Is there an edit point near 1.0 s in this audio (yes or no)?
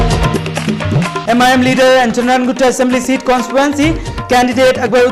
yes